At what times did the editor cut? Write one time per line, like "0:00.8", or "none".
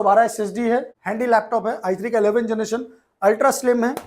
0:01.0

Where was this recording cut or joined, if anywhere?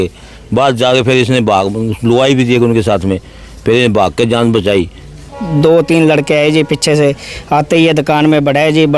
0:05.4

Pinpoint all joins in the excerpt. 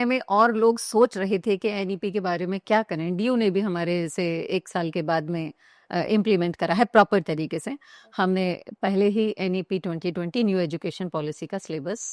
none

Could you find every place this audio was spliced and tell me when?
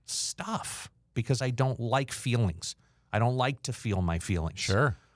0:01.1

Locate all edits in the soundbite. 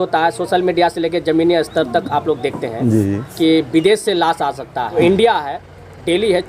0:04.9

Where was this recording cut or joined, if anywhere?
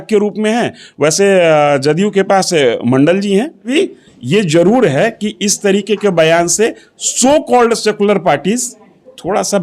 0:03.7

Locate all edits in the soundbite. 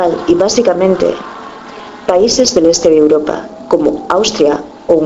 0:03.6

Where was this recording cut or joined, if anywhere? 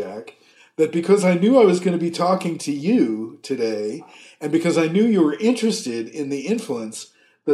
none

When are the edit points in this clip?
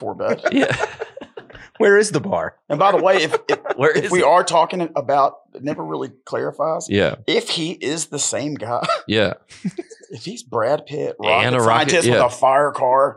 none

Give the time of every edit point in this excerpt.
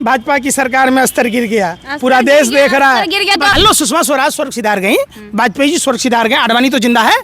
0:03.5

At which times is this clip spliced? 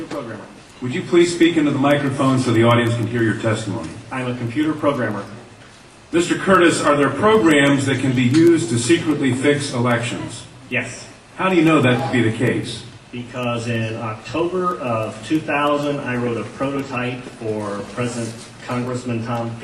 none

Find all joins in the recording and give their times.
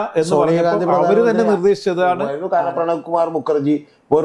0:02.3

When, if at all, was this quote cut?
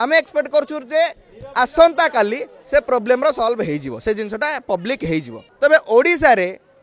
0:05.4

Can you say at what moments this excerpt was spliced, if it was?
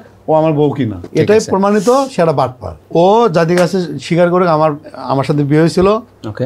0:01.0
0:02.7

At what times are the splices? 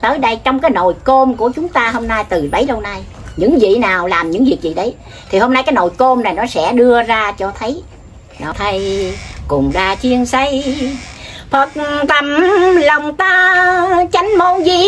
0:08.5

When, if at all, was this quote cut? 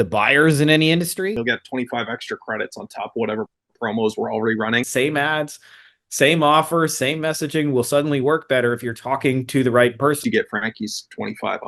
0:01.4
0:04.9
0:10.2

